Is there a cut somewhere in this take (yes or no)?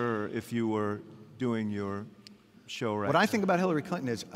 no